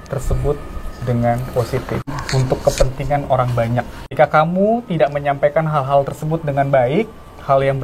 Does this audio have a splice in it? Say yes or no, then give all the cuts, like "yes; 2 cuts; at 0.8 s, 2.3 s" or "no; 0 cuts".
yes; 2 cuts; at 2.1 s, 4.0 s